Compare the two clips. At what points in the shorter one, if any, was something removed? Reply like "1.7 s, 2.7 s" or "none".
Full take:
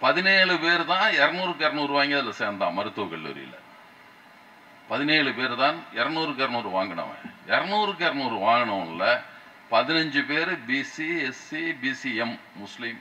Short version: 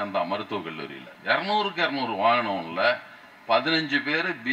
1.1 s